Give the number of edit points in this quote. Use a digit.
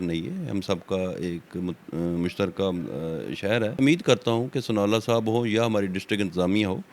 1